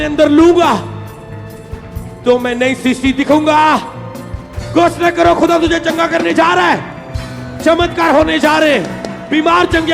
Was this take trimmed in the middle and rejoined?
no; 0 cuts

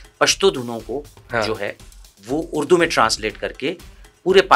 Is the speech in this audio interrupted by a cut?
no; 0 cuts

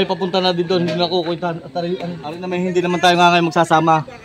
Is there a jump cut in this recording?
yes; 1 cut; at 2.5 s

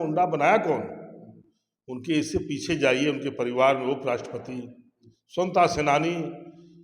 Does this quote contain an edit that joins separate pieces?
no; 0 cuts

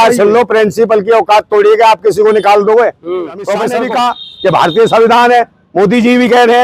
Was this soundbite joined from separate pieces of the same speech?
yes; 1 cut; at 3.7 s

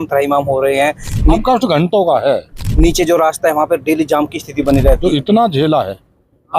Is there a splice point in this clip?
yes; 3 cuts; at 1.3 s, 2.6 s, 5.0 s

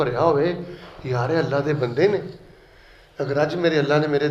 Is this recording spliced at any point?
no; 0 cuts

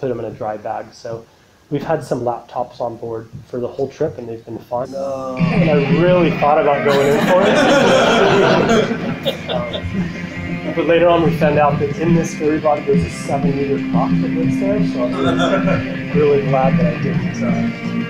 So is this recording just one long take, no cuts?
yes; 0 cuts

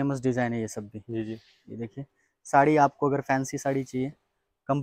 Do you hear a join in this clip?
no; 0 cuts

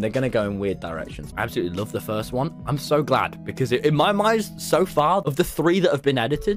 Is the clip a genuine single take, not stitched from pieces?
no; 2 cuts; at 1.2 s, 5.3 s

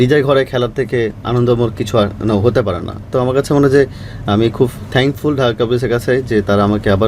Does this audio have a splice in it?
no; 0 cuts

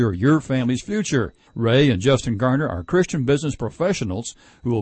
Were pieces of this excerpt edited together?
no; 0 cuts

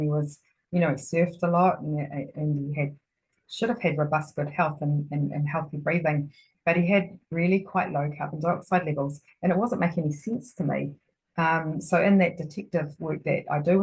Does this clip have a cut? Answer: no; 0 cuts

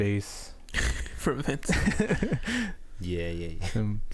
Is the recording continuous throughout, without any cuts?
yes; 0 cuts

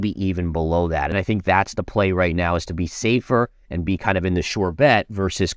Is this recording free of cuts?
no; 1 cut; at 1.1 s

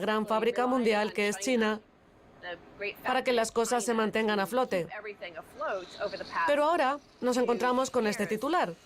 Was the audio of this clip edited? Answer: yes; 1 cut; at 7.4 s

